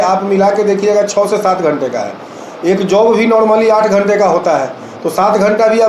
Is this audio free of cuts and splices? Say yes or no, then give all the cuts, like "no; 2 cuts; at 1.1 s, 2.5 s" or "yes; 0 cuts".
yes; 0 cuts